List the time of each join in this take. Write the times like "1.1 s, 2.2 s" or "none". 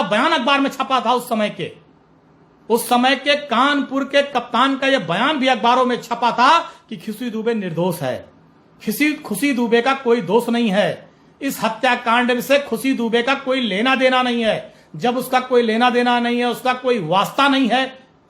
none

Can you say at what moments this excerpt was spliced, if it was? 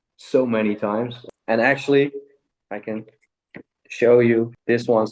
1.2 s

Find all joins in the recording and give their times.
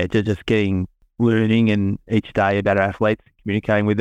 1.0 s

